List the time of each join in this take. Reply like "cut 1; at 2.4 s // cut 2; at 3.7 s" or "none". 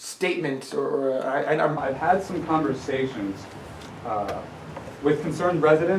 cut 1; at 1.8 s